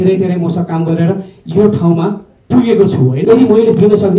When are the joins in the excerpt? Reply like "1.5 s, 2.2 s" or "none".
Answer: 3.3 s